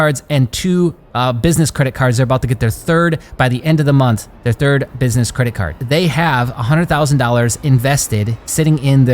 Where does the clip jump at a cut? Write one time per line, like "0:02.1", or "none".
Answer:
0:05.7